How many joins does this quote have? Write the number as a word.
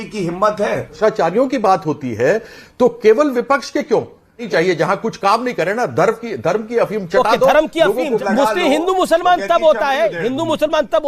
three